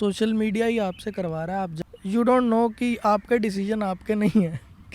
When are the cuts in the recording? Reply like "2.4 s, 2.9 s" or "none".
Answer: 1.7 s

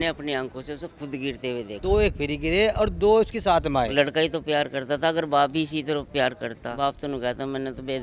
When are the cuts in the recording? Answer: 1.8 s, 3.9 s, 6.6 s

